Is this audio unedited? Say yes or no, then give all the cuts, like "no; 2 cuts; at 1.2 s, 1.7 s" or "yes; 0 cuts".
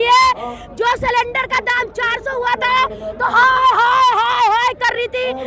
yes; 0 cuts